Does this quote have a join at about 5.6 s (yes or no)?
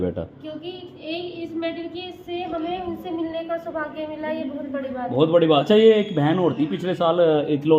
yes